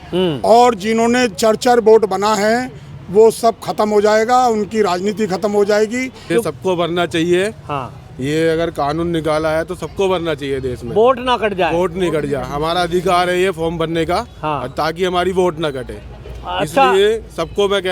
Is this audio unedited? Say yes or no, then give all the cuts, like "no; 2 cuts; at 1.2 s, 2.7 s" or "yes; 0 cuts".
no; 1 cut; at 6.2 s